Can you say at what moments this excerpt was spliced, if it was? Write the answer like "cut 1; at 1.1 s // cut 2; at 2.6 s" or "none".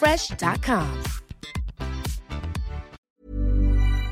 cut 1; at 3.0 s